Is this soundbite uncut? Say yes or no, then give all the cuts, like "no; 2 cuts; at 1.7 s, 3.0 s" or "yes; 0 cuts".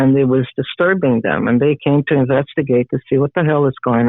yes; 0 cuts